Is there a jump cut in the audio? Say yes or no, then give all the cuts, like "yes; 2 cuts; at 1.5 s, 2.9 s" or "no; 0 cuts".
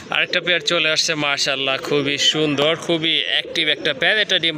no; 0 cuts